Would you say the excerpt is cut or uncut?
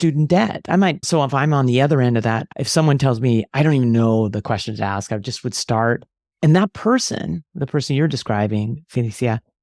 cut